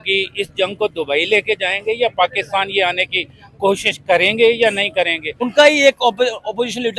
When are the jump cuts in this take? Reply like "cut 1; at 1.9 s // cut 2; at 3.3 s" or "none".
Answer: cut 1; at 5.3 s

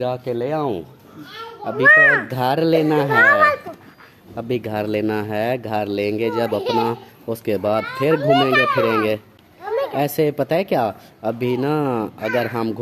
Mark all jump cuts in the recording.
none

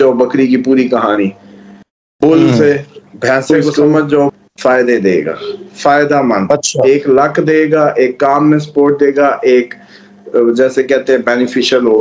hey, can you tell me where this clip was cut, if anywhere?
cut 1; at 4.4 s

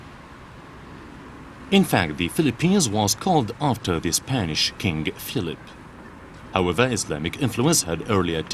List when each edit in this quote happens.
cut 1; at 4.5 s

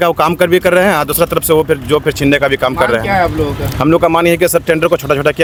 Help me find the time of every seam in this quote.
none

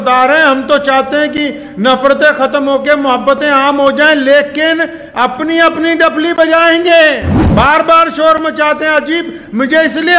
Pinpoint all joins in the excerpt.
cut 1; at 7.3 s

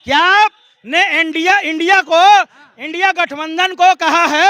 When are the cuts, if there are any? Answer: none

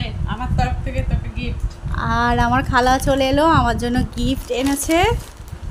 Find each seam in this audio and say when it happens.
none

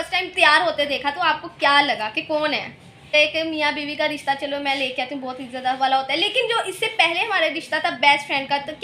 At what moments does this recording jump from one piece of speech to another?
cut 1; at 3.1 s

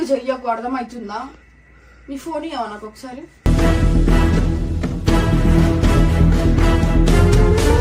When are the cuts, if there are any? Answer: none

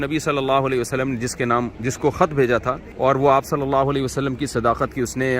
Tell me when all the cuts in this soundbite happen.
cut 1; at 1.7 s // cut 2; at 2.9 s

